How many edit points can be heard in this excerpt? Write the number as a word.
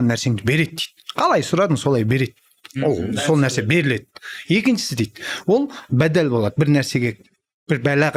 zero